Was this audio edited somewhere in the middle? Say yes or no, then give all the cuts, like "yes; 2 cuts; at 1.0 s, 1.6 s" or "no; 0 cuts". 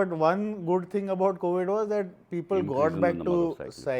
no; 0 cuts